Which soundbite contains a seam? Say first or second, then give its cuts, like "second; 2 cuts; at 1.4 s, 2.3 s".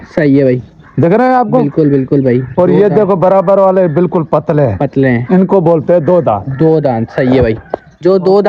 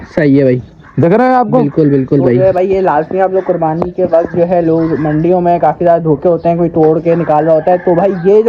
second; 1 cut; at 2.4 s